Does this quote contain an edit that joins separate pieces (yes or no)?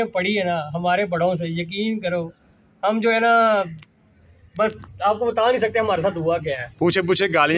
no